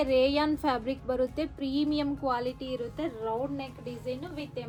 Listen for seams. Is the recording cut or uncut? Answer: uncut